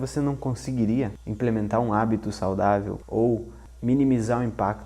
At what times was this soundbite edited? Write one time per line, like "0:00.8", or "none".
0:01.2
0:03.0
0:03.6